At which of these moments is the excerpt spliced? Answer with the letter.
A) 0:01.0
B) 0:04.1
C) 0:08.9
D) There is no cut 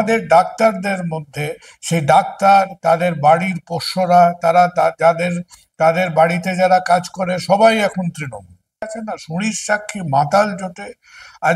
C